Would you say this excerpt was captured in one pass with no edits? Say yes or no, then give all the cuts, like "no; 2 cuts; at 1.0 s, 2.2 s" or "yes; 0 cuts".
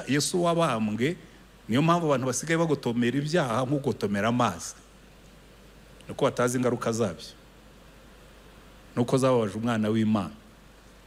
yes; 0 cuts